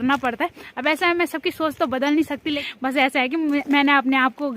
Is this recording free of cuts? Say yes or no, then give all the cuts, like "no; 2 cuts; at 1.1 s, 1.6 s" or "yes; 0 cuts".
no; 1 cut; at 2.6 s